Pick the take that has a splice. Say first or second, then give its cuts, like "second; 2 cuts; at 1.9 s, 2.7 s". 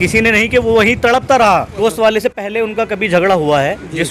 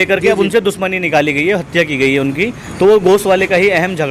first; 1 cut; at 1.7 s